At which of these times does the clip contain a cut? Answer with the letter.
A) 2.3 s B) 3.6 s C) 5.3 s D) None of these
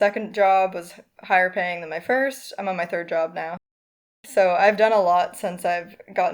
B